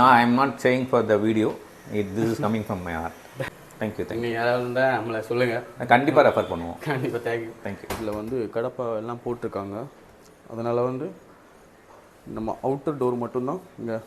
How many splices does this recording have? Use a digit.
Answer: 2